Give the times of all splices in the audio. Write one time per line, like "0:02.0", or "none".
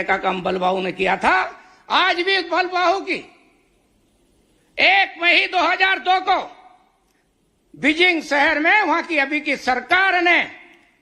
none